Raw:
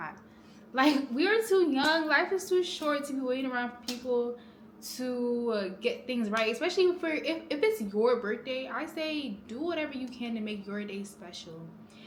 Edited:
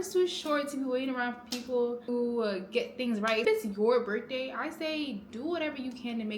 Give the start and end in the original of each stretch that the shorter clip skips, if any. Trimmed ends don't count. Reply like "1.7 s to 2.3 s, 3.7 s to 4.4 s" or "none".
4.4 s to 5.2 s, 6.5 s to 7.6 s